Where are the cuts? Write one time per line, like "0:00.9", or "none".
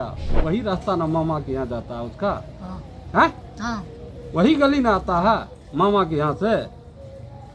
none